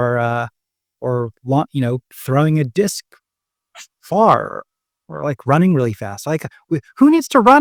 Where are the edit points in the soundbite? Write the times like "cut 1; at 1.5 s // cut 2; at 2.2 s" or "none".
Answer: none